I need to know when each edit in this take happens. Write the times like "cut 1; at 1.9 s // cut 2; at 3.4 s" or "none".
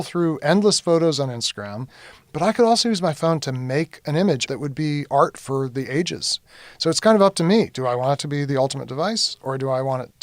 cut 1; at 2.1 s // cut 2; at 4.4 s // cut 3; at 6.4 s

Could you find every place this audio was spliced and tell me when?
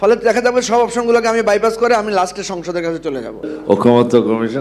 cut 1; at 3.5 s

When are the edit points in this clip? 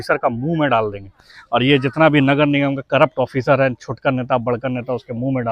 none

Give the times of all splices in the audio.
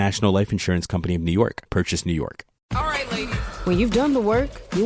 cut 1; at 2.5 s

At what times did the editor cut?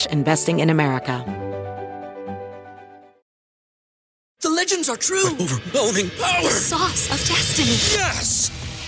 cut 1; at 1.2 s

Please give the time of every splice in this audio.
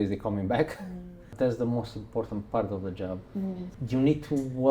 cut 1; at 1.3 s // cut 2; at 3.7 s

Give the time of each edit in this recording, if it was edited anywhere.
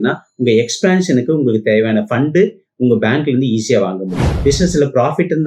cut 1; at 4.2 s

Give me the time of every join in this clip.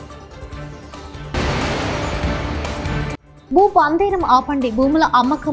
cut 1; at 1.1 s

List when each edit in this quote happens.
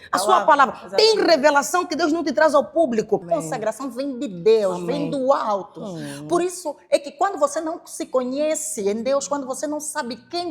cut 1; at 3.2 s

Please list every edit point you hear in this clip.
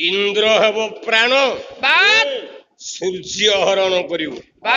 none

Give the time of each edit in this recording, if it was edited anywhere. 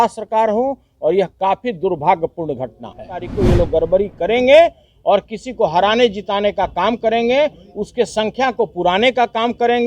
cut 1; at 3.3 s

